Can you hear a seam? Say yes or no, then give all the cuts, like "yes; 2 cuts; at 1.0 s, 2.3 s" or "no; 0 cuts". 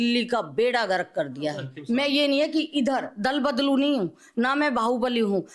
yes; 1 cut; at 1.7 s